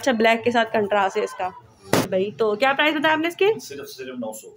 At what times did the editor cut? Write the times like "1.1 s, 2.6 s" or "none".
2.1 s

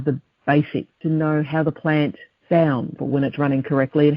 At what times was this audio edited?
1.0 s, 2.3 s, 3.0 s

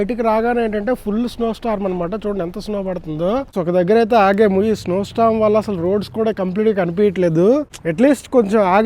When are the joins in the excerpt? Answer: 3.6 s, 7.8 s

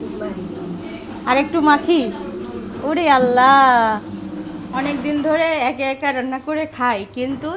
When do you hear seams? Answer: 4.6 s

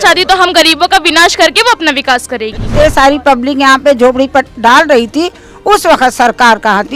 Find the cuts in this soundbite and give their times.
2.7 s

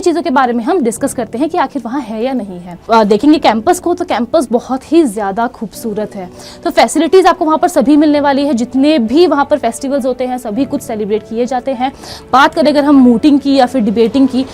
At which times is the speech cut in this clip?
2.7 s

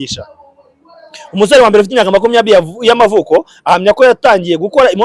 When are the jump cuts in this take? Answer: none

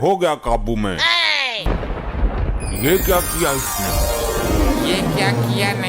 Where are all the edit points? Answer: 1.7 s

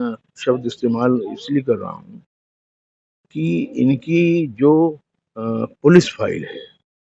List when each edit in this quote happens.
none

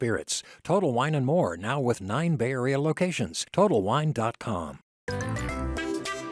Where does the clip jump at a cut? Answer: 4.9 s

